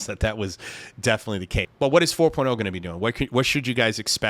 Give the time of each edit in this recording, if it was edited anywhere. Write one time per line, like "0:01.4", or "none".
0:01.6